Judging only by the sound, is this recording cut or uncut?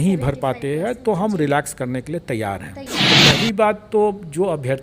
cut